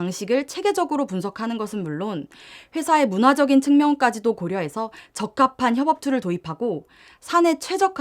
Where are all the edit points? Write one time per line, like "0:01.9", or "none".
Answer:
none